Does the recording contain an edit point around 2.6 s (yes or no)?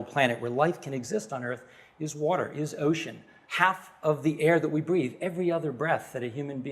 no